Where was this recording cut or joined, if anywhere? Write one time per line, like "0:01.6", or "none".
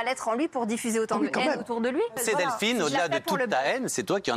0:02.2